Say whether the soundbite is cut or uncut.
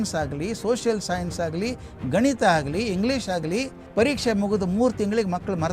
cut